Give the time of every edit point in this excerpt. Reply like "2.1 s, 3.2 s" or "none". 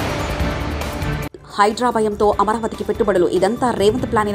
none